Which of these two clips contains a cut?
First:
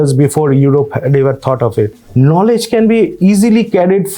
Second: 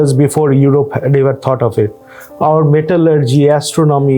first; 1 cut; at 2.0 s

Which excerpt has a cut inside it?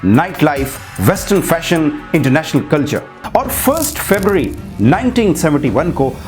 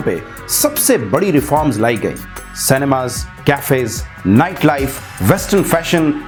first; 1 cut; at 3.1 s

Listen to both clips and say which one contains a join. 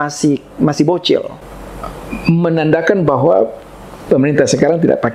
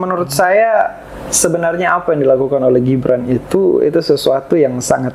first; 1 cut; at 1.3 s

